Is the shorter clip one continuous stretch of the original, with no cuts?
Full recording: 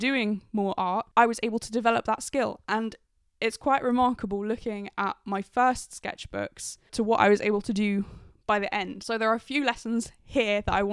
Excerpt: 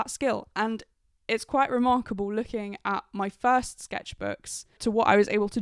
yes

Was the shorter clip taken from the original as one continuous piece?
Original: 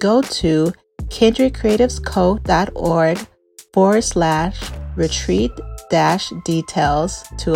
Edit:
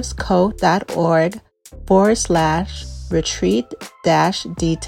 yes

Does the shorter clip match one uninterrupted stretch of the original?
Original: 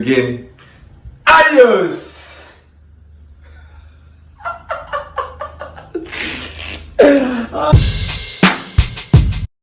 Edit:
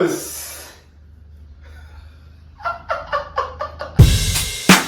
no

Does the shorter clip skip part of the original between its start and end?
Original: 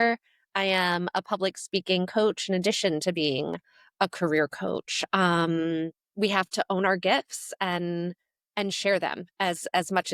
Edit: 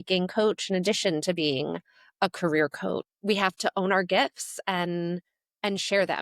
yes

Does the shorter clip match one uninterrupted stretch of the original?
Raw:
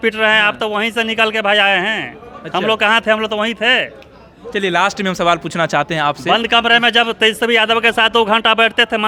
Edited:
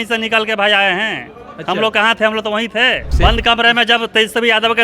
no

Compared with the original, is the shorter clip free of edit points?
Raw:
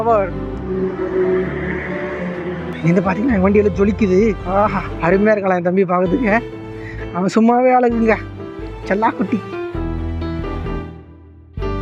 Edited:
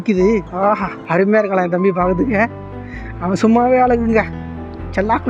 yes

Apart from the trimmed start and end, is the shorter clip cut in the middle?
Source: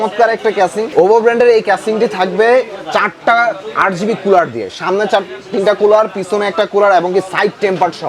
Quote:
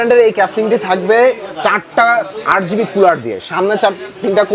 no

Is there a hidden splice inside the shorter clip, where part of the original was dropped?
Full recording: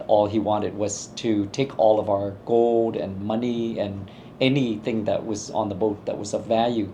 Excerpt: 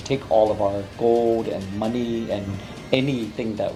no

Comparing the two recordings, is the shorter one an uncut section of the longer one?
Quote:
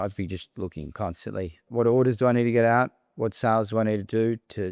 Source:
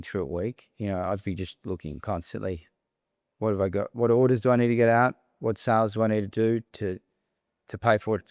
no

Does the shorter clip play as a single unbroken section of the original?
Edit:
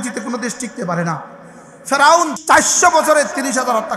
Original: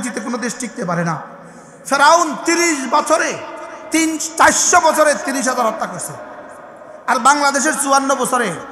no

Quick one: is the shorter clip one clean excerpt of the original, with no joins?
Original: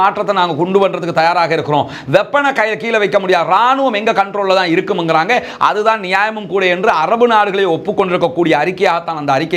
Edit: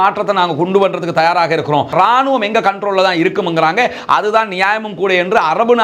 no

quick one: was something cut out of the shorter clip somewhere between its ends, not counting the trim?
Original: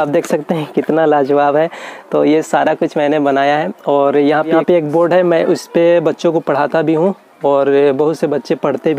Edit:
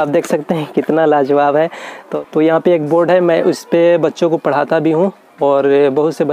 yes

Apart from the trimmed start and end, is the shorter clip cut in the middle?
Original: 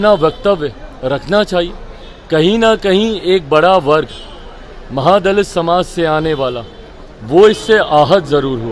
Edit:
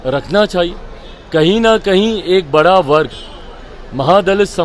no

